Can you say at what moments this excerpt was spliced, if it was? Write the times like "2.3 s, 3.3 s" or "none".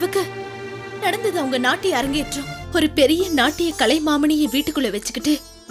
2.6 s